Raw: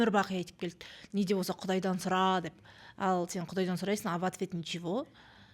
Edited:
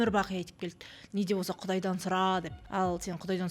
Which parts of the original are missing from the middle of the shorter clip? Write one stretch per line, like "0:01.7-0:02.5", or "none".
0:02.6-0:02.8